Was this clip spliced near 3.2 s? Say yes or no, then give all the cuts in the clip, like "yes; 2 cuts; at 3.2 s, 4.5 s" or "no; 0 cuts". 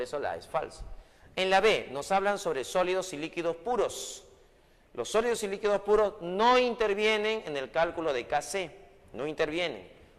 yes; 1 cut; at 3.2 s